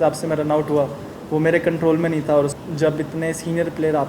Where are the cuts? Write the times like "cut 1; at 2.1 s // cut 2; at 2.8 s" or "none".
cut 1; at 2.5 s

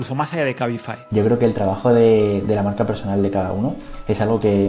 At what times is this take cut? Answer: cut 1; at 1.0 s

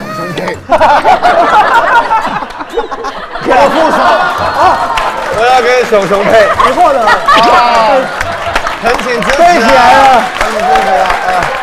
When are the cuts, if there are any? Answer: none

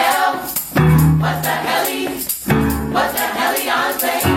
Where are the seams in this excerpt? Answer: none

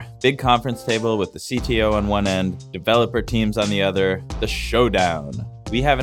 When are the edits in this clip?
cut 1; at 2.7 s

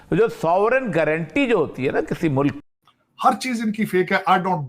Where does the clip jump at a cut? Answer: cut 1; at 2.6 s

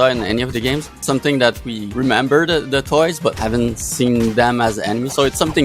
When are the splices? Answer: cut 1; at 1.0 s // cut 2; at 1.8 s // cut 3; at 3.4 s

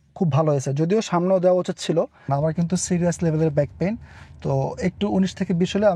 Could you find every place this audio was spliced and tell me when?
cut 1; at 2.2 s

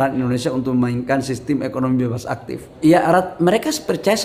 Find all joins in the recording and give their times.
cut 1; at 2.7 s

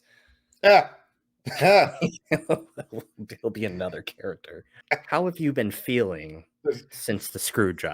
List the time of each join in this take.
cut 1; at 4.7 s

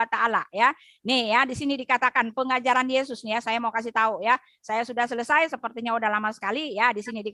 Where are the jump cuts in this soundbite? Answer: none

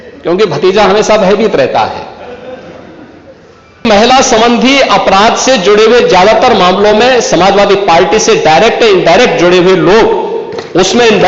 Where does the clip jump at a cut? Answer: cut 1; at 3.8 s

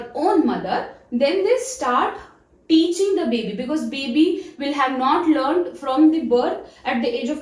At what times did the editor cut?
none

